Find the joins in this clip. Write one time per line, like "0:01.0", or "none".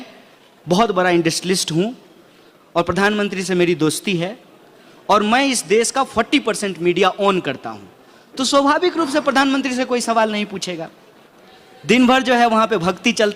none

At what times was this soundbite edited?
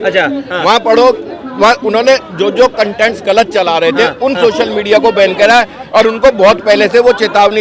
none

